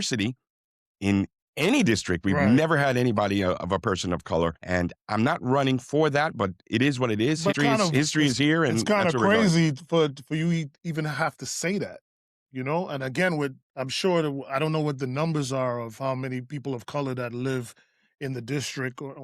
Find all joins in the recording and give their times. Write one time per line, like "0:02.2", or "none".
0:04.6
0:07.5
0:12.4